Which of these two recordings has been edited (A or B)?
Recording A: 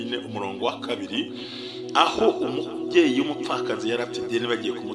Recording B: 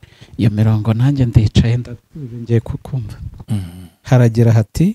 B